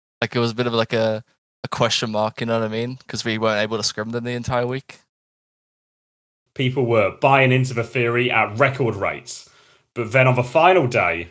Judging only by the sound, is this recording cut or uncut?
cut